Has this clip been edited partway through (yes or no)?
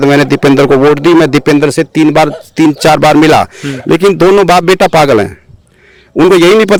no